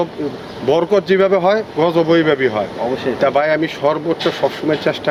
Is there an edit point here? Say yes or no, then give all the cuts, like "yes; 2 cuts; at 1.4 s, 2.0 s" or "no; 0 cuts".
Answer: no; 0 cuts